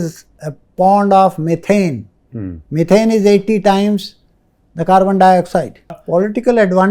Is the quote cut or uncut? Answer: cut